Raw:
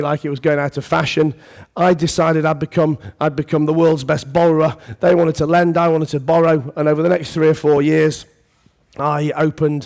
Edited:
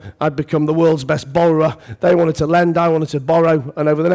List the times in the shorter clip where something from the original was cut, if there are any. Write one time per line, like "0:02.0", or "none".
none